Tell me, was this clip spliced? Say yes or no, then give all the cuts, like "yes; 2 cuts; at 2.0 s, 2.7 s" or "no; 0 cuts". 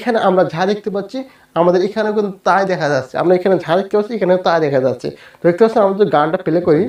no; 0 cuts